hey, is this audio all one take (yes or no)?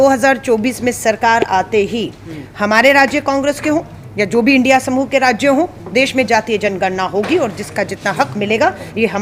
yes